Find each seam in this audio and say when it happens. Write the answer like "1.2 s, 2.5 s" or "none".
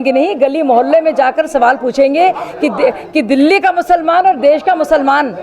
none